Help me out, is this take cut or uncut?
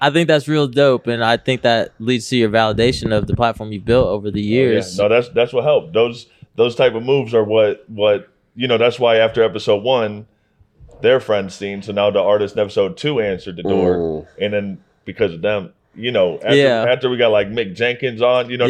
uncut